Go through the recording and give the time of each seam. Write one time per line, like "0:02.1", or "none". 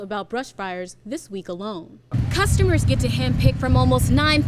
0:02.1